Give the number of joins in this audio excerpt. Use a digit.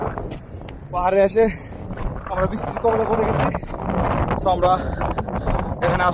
0